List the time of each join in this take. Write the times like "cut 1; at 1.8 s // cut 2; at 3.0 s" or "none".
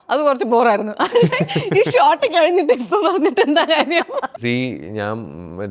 cut 1; at 4.3 s